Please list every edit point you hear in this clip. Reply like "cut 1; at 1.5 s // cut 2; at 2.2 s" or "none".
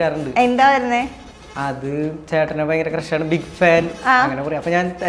none